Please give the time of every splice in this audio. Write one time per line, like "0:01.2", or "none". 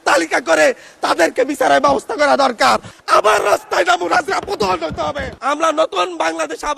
0:02.9
0:05.4